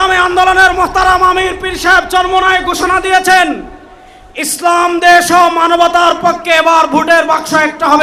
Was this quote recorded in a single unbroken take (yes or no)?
yes